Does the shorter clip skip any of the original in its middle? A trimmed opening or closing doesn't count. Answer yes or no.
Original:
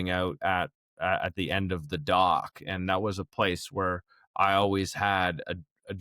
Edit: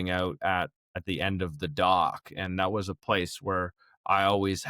yes